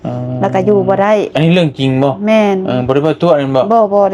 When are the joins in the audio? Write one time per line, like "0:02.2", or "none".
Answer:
none